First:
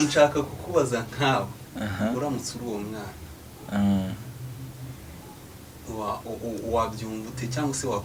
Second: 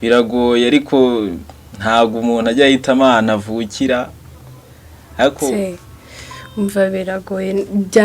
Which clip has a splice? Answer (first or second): second